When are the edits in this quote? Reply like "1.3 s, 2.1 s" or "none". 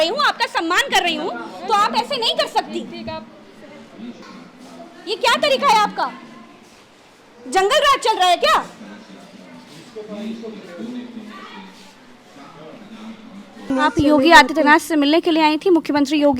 4.2 s, 13.7 s